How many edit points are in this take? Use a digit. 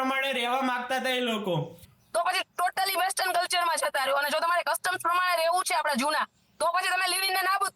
1